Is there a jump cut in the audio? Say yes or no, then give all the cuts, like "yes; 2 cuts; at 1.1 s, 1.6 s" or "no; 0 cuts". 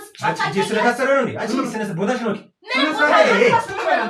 no; 0 cuts